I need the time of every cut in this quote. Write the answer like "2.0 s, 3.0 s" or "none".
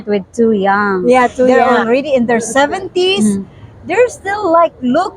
1.6 s